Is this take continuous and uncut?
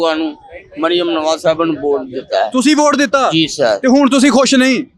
yes; 0 cuts

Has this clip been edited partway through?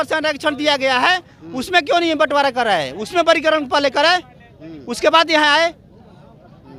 no; 0 cuts

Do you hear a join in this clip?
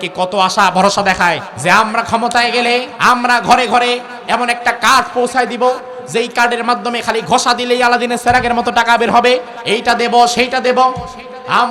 yes; 3 cuts; at 1.5 s, 2.9 s, 9.5 s

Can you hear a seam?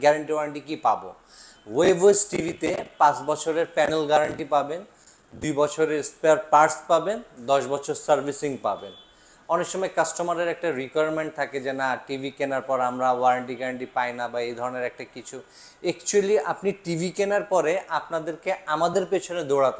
no; 0 cuts

